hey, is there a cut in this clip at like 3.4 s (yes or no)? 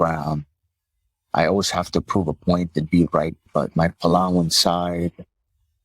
yes